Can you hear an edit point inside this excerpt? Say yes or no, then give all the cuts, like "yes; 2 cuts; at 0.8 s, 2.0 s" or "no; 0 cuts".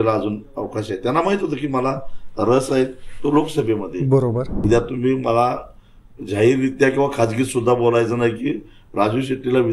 yes; 1 cut; at 4.6 s